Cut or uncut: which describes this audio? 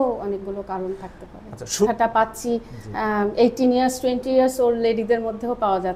cut